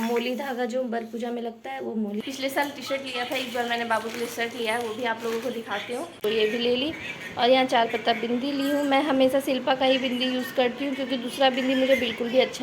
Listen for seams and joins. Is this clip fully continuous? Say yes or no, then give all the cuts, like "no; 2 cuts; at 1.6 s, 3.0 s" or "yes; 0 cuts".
no; 2 cuts; at 2.2 s, 6.2 s